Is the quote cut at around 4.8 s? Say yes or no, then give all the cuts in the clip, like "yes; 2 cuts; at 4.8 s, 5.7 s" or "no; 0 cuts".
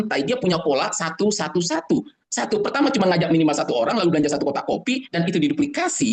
no; 0 cuts